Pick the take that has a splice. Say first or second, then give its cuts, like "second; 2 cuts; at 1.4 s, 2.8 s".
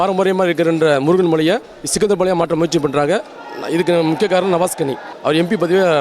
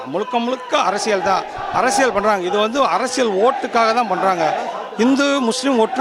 first; 2 cuts; at 1.8 s, 5.1 s